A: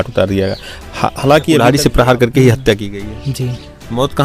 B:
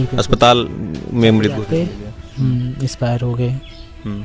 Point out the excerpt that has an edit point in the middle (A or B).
A